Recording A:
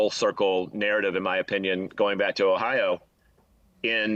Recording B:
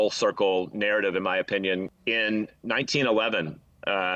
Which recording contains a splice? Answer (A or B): B